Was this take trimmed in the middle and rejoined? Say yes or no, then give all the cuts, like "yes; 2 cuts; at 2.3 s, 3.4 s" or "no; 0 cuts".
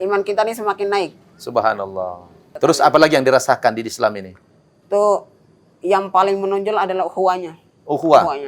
yes; 1 cut; at 2.4 s